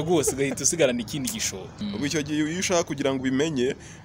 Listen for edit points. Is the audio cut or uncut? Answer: cut